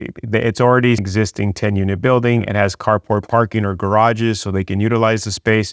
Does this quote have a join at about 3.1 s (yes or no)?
no